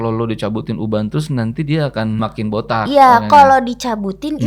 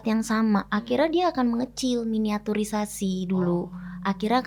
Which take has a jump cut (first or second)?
first